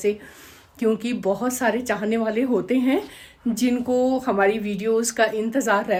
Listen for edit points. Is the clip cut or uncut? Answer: uncut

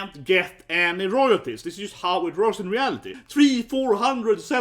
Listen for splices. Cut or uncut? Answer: cut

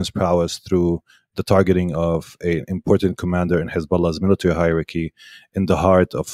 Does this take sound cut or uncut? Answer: uncut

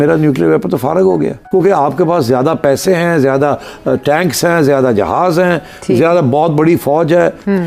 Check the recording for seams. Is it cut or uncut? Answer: cut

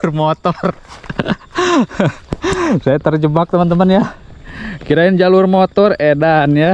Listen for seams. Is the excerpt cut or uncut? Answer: uncut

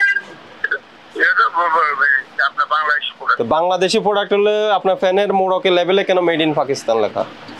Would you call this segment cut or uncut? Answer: uncut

